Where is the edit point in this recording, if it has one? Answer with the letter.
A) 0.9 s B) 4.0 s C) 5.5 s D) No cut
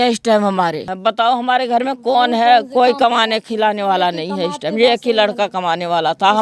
A